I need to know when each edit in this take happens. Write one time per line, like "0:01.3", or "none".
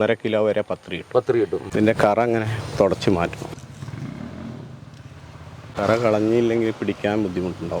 0:01.7